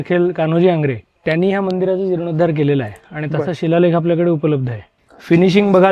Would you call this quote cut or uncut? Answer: cut